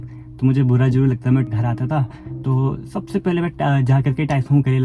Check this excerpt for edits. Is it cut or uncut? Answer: cut